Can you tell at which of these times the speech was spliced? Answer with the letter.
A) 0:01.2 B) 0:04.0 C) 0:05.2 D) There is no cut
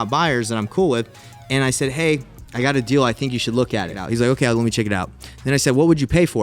B